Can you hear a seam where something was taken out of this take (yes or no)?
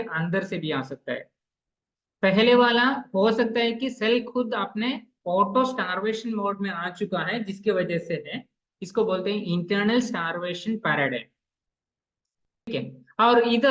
yes